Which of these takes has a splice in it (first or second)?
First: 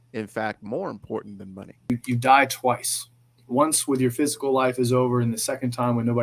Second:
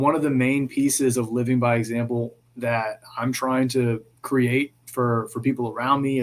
first